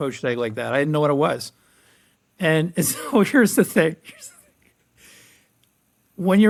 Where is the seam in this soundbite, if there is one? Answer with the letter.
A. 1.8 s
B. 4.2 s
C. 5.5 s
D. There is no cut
D